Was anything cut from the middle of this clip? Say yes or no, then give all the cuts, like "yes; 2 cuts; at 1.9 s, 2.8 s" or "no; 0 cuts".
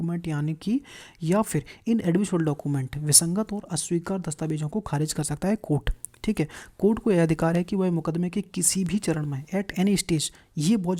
no; 0 cuts